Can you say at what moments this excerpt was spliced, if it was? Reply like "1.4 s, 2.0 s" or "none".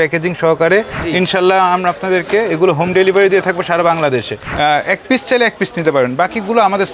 1.0 s, 4.4 s